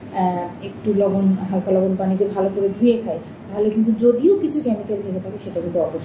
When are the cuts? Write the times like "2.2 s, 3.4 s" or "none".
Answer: none